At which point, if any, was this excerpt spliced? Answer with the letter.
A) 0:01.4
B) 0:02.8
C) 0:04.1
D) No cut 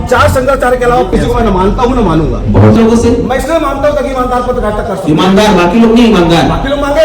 B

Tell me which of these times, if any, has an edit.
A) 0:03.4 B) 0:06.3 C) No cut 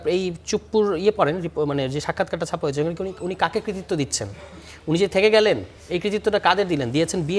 C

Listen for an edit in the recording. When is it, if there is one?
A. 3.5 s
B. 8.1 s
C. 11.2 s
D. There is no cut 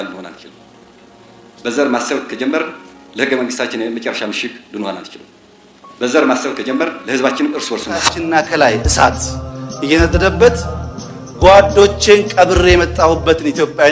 B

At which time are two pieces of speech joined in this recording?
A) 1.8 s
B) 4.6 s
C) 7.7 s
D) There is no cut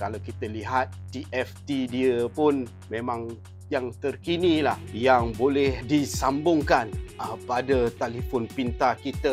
D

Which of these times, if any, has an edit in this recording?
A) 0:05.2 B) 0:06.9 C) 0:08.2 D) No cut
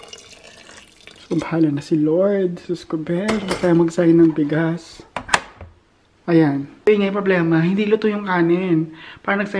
B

